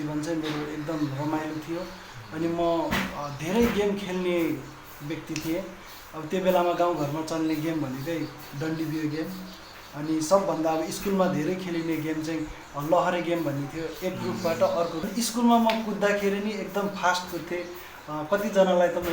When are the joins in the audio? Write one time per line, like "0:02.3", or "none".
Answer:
0:15.0